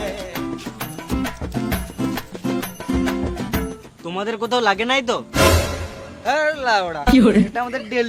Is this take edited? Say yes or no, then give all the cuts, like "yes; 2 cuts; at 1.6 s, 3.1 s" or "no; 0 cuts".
no; 0 cuts